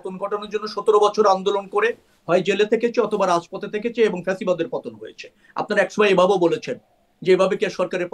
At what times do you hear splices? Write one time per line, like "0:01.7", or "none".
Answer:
none